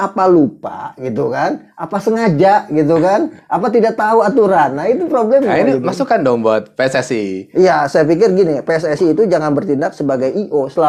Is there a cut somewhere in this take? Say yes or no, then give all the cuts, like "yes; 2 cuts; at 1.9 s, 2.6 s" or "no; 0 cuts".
no; 0 cuts